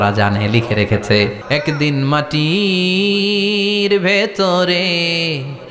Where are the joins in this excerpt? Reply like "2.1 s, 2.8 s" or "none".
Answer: 1.4 s